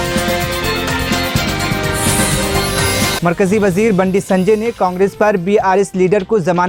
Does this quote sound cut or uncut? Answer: uncut